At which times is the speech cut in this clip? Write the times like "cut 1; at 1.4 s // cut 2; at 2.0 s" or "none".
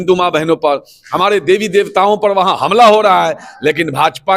none